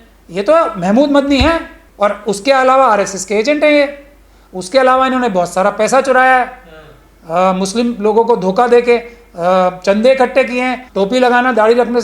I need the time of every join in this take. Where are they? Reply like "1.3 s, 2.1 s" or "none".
1.8 s, 10.8 s